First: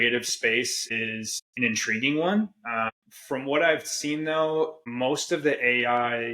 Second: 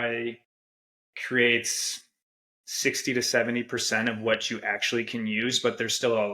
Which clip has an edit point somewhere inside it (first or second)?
first